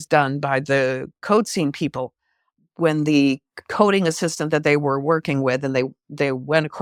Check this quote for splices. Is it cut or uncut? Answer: uncut